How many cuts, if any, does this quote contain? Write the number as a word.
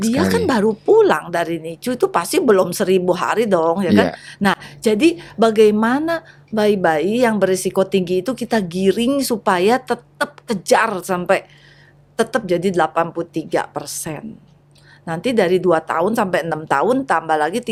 zero